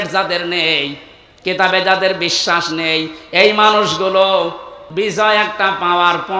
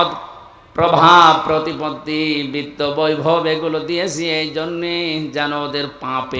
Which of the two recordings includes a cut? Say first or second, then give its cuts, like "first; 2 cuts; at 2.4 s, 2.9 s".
first; 1 cut; at 4.8 s